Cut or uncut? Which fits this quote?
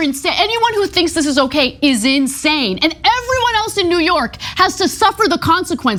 uncut